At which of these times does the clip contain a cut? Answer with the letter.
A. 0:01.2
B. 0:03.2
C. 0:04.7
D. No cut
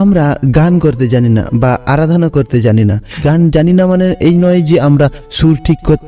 B